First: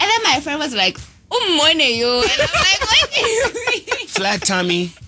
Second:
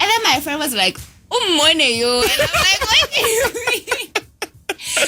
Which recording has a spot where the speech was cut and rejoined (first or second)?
first